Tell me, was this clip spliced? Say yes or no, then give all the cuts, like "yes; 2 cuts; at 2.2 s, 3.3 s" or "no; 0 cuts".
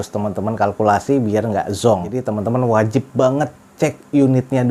yes; 1 cut; at 2.2 s